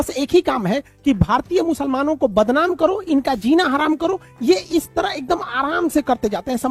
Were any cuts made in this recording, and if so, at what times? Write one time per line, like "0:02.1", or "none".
none